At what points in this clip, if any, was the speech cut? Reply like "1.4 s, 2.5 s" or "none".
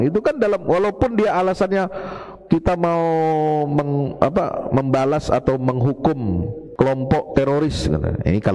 6.6 s